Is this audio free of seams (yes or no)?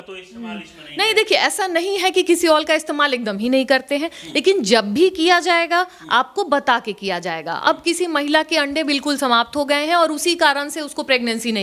yes